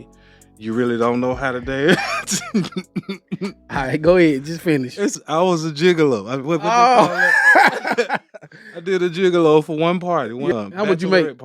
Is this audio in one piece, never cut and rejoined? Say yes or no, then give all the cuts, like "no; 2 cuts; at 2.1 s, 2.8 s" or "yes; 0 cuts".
no; 2 cuts; at 5.1 s, 10.5 s